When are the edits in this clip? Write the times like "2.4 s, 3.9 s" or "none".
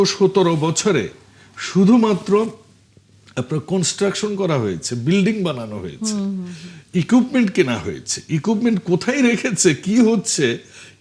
none